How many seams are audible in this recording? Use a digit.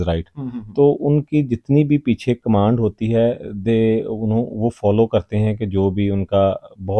0